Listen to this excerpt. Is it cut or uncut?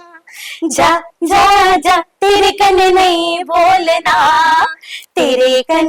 uncut